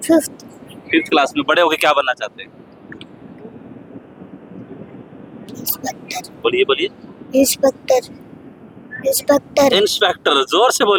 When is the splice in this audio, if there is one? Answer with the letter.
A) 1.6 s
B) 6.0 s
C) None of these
C